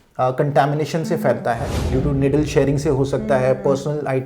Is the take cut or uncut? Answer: cut